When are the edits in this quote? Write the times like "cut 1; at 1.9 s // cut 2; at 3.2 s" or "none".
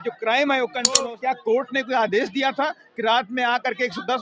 cut 1; at 1.0 s